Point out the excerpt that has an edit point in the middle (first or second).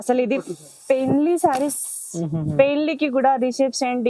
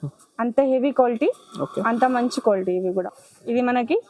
second